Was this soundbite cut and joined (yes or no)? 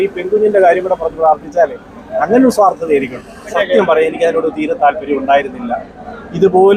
no